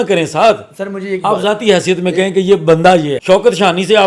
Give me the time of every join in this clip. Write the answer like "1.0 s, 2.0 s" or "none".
3.2 s

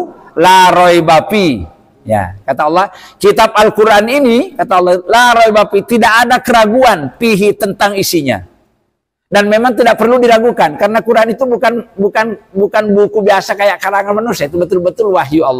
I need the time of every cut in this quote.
none

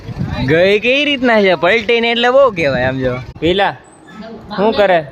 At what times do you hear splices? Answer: 3.3 s

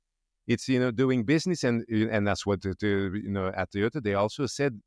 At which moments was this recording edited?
none

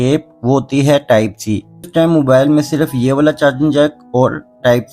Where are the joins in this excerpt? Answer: 1.9 s

